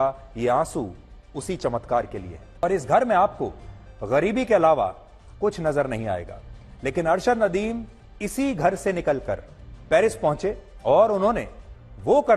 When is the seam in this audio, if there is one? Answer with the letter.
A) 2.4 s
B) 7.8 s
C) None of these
A